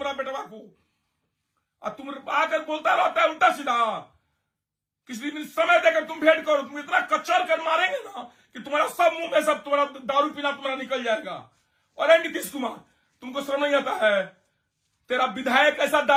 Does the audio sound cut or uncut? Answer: uncut